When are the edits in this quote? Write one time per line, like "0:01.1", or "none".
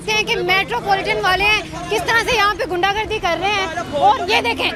none

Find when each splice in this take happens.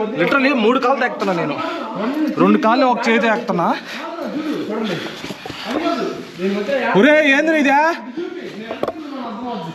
none

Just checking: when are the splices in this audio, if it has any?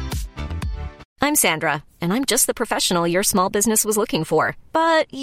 0:01.0

